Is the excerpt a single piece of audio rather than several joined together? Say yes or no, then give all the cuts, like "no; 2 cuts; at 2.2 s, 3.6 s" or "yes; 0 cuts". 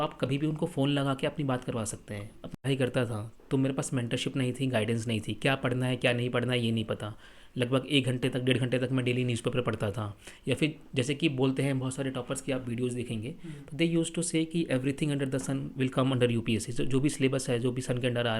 no; 1 cut; at 2.6 s